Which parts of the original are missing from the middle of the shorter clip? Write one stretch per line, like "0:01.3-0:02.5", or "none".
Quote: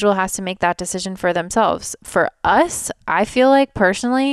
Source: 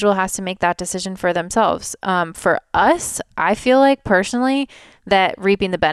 0:02.0-0:02.3